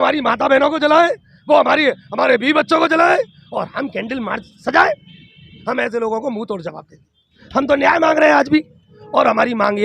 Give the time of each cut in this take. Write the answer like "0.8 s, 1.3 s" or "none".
5.5 s, 7.4 s, 8.9 s